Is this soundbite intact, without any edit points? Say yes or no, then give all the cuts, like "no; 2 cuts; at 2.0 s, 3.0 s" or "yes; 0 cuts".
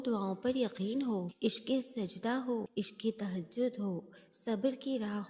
no; 2 cuts; at 1.3 s, 2.7 s